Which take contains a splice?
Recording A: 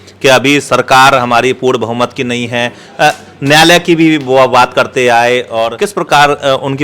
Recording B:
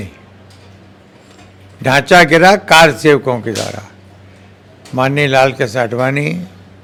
A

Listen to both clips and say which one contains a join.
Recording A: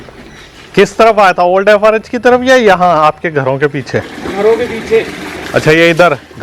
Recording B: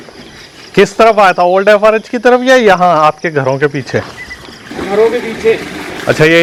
A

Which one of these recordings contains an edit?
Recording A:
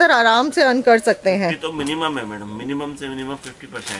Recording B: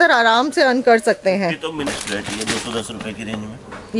B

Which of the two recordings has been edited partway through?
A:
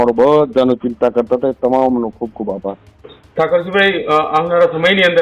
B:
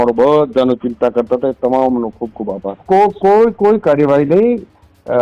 B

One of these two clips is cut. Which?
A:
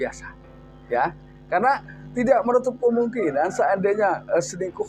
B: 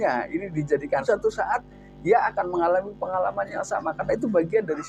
B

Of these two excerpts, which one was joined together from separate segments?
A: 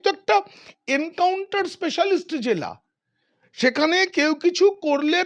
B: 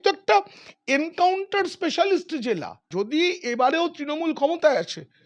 B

